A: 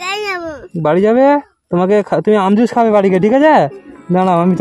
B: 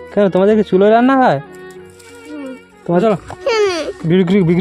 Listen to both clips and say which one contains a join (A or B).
B